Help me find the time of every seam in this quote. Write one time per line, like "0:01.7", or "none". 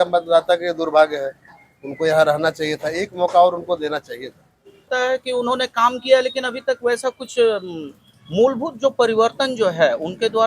0:04.8